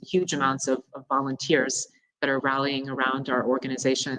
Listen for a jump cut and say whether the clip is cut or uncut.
uncut